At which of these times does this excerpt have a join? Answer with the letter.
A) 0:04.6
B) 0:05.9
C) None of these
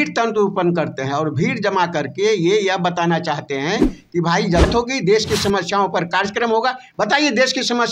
A